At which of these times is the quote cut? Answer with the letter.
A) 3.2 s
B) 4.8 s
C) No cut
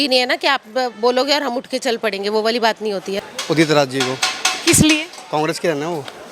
A